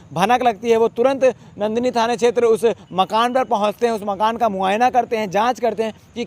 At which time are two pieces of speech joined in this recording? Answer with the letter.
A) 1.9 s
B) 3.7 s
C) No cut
C